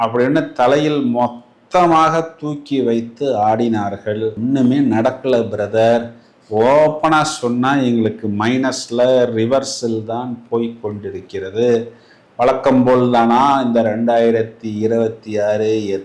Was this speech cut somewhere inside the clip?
no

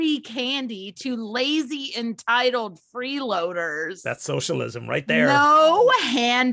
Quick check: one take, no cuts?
no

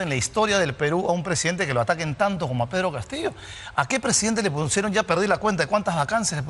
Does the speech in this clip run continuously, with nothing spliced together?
yes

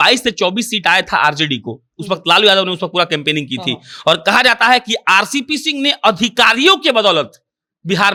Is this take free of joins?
yes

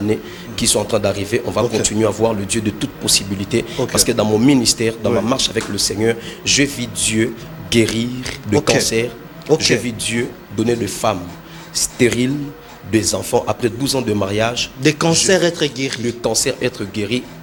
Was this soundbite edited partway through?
no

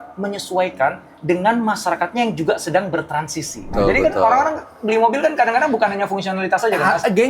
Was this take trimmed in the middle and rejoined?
yes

